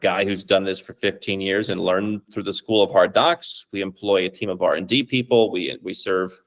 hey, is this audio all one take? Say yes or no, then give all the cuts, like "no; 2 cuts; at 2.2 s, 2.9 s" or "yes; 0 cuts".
yes; 0 cuts